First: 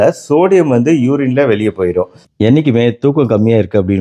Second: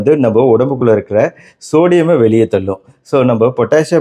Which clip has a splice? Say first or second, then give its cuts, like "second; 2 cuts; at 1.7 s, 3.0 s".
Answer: first; 1 cut; at 2.3 s